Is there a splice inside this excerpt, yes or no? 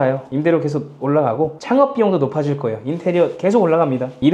no